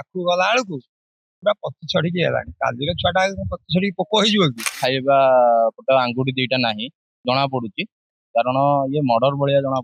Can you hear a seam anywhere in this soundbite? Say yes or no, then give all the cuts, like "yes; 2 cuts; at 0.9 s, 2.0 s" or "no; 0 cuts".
yes; 1 cut; at 4.7 s